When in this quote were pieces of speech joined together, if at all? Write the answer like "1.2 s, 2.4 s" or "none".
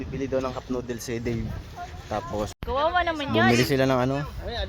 2.5 s